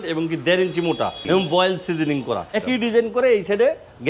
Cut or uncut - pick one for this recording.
cut